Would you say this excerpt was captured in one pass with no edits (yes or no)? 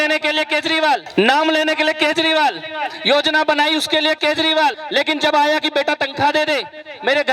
no